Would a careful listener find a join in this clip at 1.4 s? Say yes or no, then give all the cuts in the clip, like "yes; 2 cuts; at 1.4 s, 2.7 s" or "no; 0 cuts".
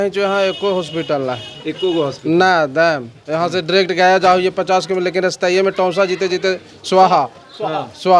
no; 0 cuts